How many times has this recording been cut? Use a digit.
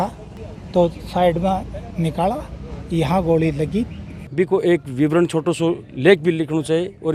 1